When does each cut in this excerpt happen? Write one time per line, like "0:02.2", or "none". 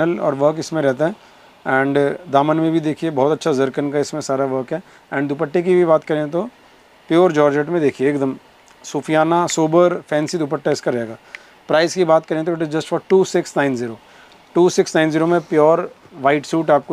none